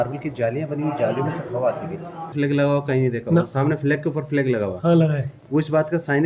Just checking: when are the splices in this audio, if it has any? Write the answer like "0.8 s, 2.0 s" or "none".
2.2 s